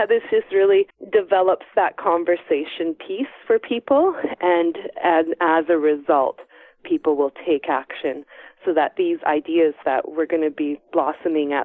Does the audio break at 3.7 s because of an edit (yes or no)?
no